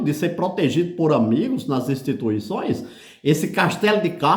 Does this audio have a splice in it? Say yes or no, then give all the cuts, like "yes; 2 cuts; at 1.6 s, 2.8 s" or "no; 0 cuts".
no; 0 cuts